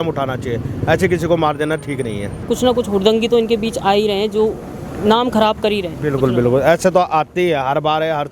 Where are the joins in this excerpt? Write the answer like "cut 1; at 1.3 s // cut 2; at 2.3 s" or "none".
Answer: cut 1; at 2.4 s